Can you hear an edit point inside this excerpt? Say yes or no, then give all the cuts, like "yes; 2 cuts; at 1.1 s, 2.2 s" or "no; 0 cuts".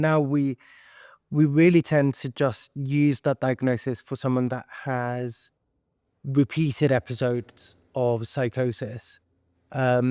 no; 0 cuts